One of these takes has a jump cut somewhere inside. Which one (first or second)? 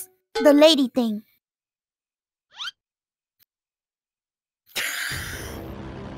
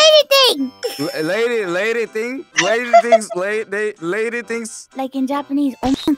second